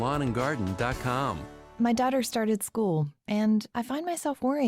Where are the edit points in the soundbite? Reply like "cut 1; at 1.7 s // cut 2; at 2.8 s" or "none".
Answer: cut 1; at 1.5 s